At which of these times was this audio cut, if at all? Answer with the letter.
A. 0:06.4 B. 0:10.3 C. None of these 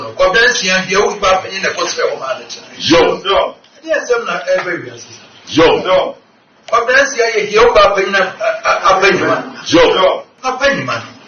B